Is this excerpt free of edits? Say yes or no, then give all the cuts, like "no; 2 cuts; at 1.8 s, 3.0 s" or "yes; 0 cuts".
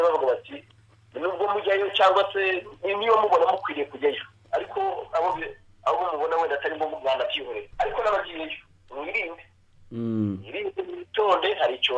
yes; 0 cuts